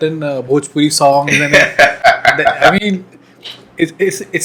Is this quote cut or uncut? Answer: uncut